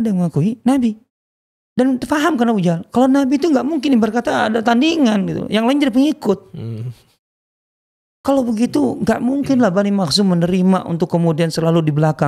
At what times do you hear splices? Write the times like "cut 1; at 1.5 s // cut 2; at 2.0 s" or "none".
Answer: none

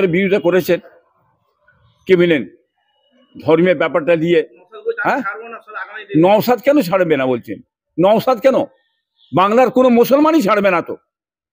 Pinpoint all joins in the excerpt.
cut 1; at 4.6 s

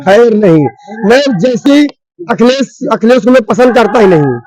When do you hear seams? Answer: cut 1; at 1.6 s

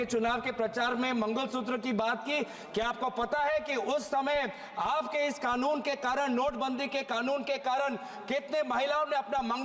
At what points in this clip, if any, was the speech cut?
none

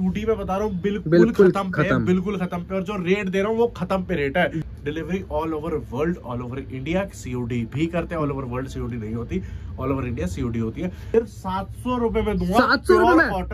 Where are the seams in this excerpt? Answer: cut 1; at 4.6 s // cut 2; at 11.0 s

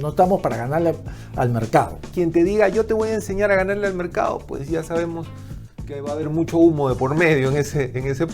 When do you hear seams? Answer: cut 1; at 2.0 s

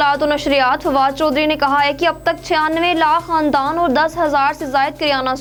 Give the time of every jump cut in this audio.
none

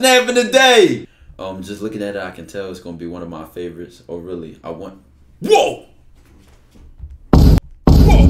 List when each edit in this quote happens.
cut 1; at 1.2 s

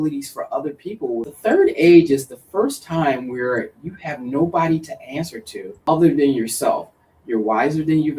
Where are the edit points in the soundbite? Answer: cut 1; at 1.3 s // cut 2; at 5.8 s

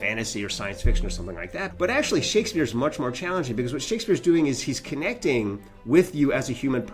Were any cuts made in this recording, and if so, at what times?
cut 1; at 1.7 s

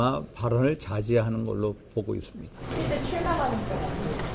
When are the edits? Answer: cut 1; at 2.6 s

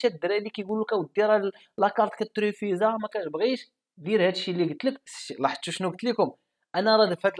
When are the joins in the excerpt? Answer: cut 1; at 5.1 s

